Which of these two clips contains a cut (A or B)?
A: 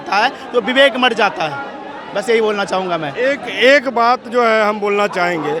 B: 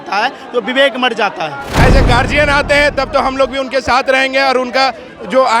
B